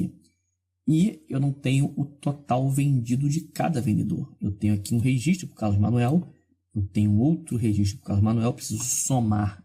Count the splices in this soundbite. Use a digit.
0